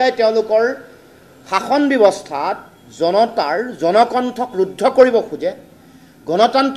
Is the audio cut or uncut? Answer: uncut